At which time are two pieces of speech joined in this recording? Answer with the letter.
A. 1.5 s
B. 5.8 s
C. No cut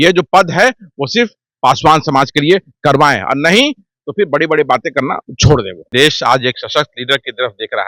B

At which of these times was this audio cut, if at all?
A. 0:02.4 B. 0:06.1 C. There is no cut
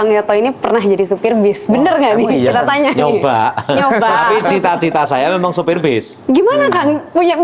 C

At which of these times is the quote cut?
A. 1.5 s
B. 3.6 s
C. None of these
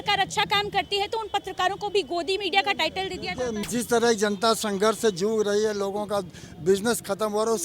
B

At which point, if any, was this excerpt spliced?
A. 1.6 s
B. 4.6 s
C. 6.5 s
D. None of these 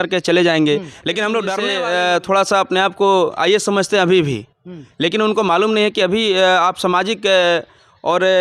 A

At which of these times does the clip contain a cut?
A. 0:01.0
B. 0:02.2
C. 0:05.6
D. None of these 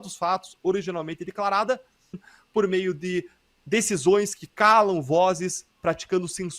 B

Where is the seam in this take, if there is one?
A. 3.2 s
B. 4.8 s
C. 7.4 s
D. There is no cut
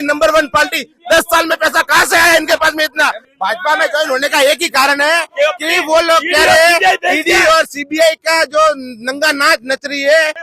A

